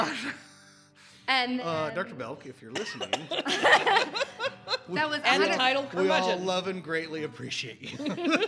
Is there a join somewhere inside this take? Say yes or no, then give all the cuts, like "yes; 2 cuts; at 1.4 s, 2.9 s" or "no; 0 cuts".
no; 0 cuts